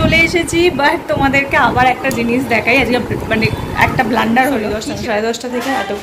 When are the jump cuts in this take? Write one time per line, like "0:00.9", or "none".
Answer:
0:04.8